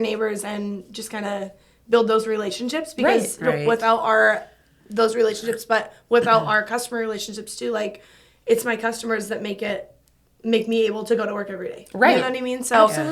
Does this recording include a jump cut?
no; 0 cuts

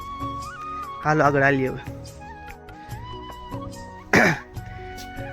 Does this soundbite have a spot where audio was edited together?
no; 0 cuts

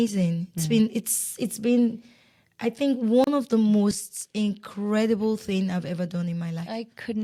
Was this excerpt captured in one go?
yes; 0 cuts

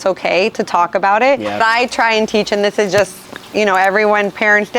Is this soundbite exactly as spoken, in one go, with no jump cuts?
no; 1 cut; at 1.6 s

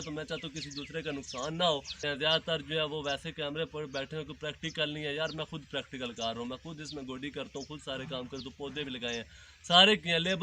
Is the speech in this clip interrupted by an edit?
yes; 1 cut; at 2.0 s

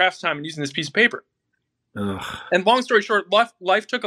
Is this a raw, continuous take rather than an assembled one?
yes; 0 cuts

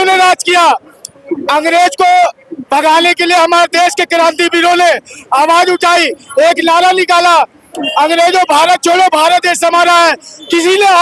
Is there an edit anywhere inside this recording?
no; 0 cuts

